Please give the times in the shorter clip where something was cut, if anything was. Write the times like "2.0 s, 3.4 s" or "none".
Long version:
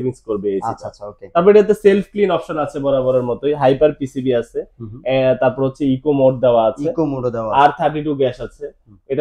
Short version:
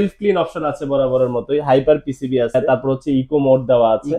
2.5 s